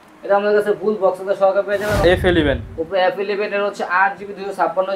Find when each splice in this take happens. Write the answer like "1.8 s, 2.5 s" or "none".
2.0 s